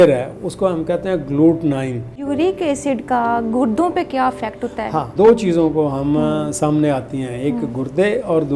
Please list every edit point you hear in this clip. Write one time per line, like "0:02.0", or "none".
0:02.2
0:05.1